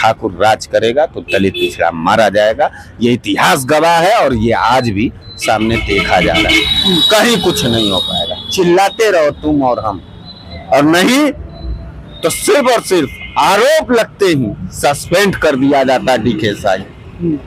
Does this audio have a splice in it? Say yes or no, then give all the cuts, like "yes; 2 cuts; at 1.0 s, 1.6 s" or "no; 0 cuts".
no; 0 cuts